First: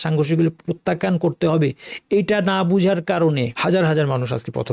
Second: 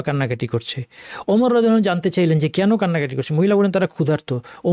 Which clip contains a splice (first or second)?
first